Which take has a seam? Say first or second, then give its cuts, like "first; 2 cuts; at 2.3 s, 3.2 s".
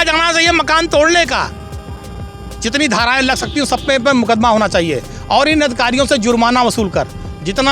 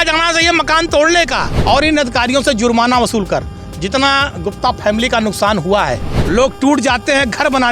second; 2 cuts; at 1.5 s, 6.1 s